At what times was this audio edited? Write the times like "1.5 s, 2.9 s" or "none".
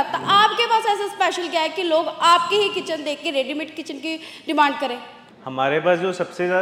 none